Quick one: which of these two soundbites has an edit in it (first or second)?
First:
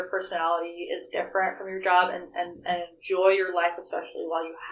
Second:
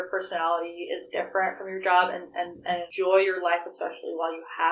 second